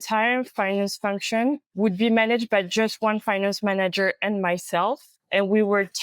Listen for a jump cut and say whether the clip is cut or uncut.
cut